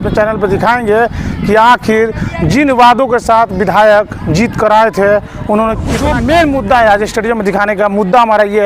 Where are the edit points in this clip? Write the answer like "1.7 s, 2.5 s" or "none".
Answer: 5.9 s